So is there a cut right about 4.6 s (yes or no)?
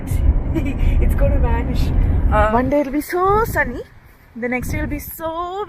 no